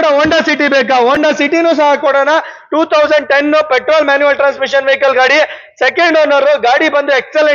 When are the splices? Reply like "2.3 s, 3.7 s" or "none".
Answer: none